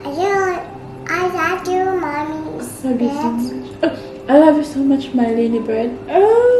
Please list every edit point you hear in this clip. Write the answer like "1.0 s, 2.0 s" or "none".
none